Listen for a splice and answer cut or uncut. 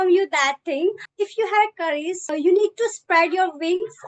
cut